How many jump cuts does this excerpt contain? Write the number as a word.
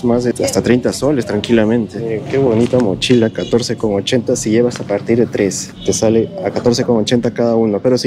zero